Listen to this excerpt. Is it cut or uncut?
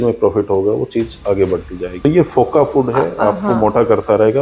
cut